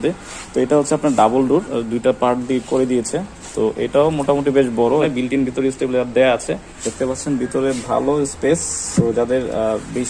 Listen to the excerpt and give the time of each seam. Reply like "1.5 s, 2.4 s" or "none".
5.1 s, 6.8 s, 8.8 s